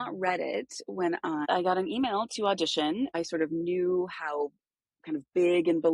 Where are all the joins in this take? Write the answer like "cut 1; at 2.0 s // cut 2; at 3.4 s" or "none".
cut 1; at 1.4 s // cut 2; at 3.1 s

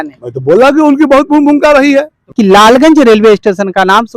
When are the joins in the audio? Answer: cut 1; at 2.3 s

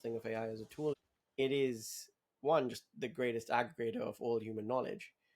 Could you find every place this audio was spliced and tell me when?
cut 1; at 0.9 s

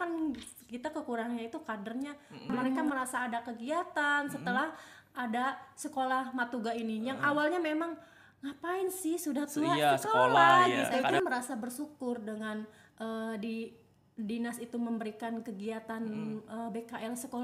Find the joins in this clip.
cut 1; at 2.8 s // cut 2; at 11.2 s

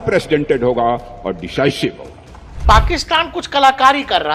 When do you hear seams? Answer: cut 1; at 2.6 s

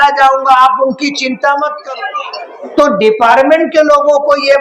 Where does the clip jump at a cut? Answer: cut 1; at 1.8 s

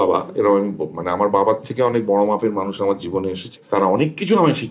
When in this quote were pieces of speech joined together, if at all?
cut 1; at 3.5 s

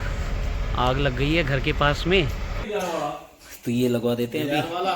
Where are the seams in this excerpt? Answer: cut 1; at 2.6 s

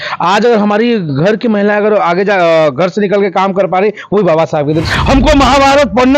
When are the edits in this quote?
cut 1; at 4.8 s

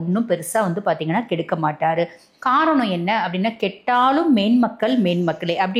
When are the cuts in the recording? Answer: none

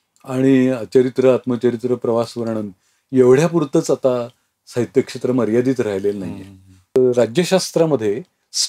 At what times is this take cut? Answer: cut 1; at 7.0 s

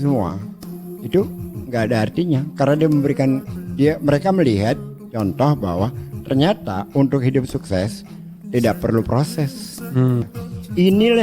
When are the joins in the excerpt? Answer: cut 1; at 10.3 s

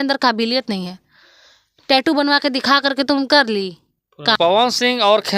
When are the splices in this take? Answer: cut 1; at 4.4 s

